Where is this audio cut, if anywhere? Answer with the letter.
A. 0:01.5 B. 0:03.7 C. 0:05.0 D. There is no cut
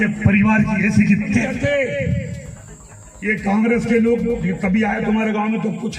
A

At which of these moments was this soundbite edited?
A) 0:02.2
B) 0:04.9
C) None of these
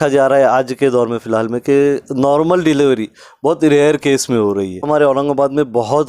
B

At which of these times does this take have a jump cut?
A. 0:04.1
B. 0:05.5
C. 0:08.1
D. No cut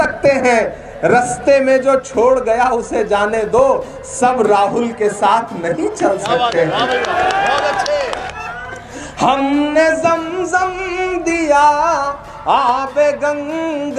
C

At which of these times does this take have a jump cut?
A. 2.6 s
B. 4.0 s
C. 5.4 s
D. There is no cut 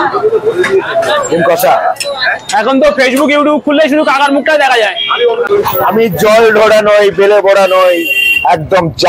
C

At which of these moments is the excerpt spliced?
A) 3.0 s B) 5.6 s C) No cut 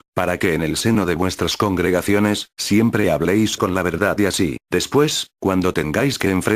C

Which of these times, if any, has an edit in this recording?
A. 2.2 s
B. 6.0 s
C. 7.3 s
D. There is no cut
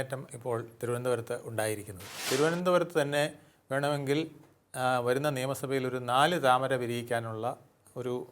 A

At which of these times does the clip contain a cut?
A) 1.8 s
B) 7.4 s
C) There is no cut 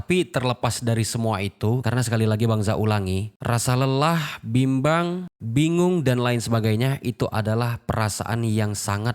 A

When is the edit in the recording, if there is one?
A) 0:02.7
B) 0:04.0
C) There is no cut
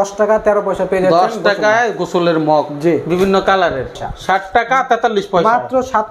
B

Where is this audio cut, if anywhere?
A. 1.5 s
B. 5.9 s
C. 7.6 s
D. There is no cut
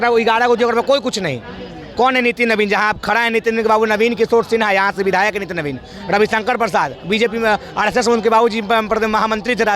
D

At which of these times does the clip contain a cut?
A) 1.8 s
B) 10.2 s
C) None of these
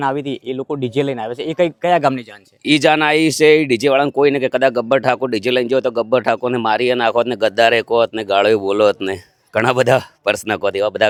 C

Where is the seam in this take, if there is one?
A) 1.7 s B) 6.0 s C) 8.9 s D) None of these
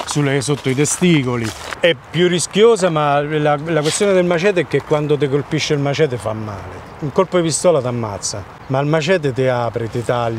A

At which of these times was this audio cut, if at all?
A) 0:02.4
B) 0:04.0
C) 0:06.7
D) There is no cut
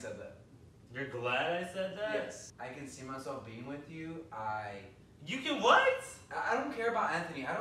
A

